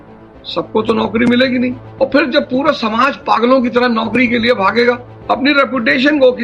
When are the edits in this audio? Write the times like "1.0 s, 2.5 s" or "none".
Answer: 1.8 s, 5.1 s